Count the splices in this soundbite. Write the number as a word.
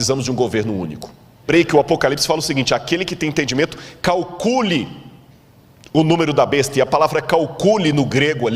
one